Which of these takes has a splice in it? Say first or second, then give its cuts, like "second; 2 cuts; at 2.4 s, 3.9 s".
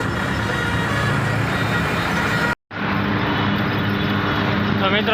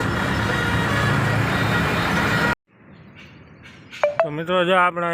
second; 1 cut; at 2.7 s